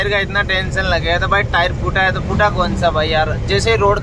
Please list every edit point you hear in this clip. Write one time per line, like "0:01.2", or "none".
none